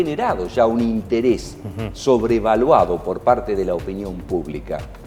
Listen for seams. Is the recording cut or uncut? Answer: uncut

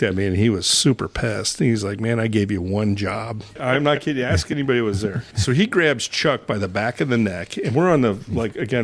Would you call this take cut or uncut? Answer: cut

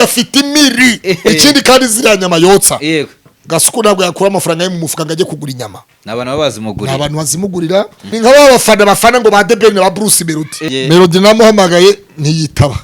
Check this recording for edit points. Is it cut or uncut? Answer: cut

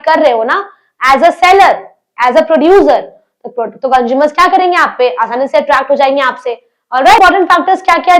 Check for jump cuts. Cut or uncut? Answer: cut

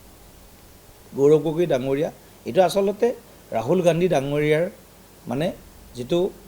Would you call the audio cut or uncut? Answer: cut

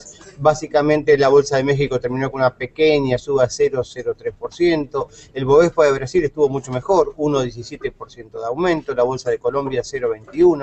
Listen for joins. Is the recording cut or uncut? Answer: uncut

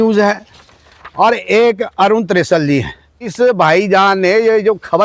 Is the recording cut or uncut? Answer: cut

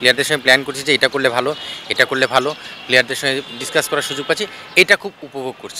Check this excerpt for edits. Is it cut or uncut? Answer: uncut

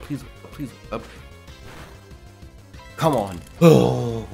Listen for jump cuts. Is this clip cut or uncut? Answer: cut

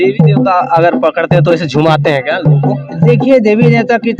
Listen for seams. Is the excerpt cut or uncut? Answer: uncut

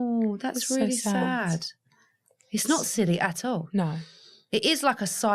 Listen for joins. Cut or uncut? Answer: uncut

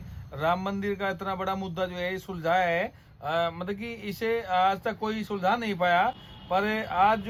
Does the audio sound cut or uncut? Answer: uncut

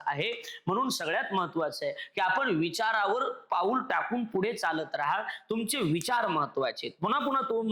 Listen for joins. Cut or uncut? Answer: uncut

